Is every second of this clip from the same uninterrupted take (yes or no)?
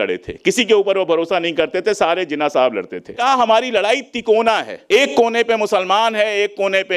no